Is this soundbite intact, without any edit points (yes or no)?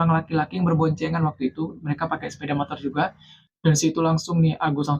yes